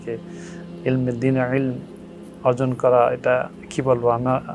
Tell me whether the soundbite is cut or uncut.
cut